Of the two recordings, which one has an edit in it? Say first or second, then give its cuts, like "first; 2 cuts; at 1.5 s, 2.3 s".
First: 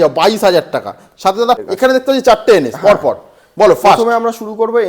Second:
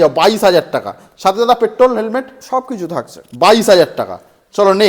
first; 1 cut; at 1.6 s